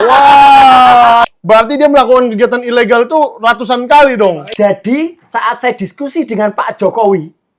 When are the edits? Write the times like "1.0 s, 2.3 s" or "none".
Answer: 1.3 s, 4.4 s